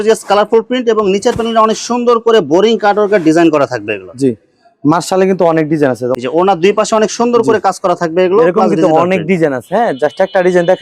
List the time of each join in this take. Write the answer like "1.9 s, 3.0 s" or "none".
none